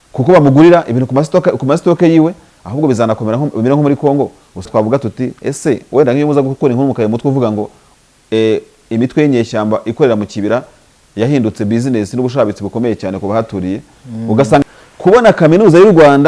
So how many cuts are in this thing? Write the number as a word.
two